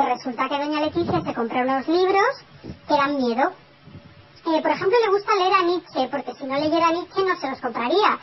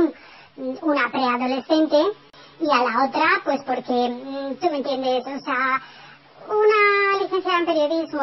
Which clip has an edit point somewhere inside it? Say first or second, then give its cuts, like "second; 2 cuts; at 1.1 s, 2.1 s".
second; 1 cut; at 1.2 s